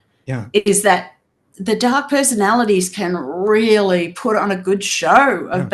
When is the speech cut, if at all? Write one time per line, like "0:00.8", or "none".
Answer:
0:01.5